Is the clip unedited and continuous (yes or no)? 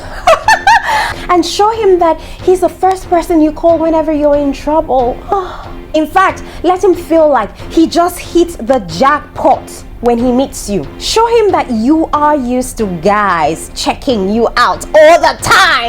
no